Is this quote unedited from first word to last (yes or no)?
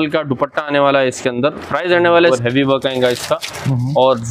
no